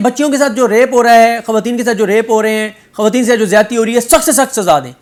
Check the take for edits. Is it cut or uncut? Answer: uncut